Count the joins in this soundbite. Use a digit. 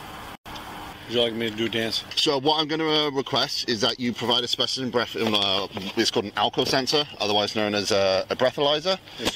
2